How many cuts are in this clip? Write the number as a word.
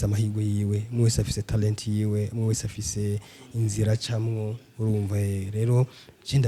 zero